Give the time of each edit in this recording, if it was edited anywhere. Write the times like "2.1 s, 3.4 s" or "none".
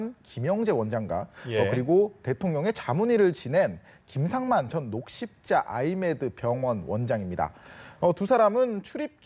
2.2 s